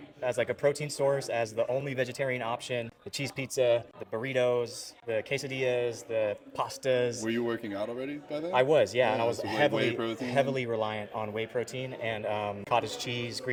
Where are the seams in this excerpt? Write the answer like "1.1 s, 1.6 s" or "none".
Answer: none